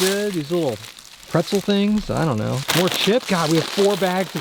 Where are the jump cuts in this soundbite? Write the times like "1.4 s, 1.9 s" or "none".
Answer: 2.9 s